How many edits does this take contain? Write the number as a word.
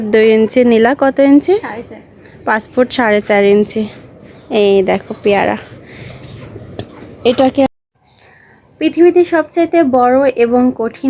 one